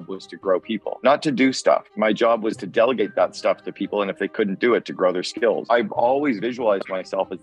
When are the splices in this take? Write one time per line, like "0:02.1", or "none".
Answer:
0:00.9
0:01.9
0:05.7